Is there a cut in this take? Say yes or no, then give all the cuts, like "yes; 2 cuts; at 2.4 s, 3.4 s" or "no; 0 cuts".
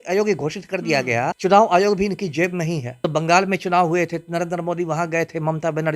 yes; 2 cuts; at 1.4 s, 3.0 s